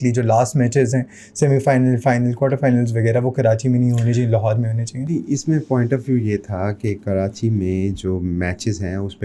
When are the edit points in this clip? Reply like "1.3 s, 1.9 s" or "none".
none